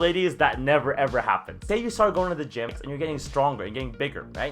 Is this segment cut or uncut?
cut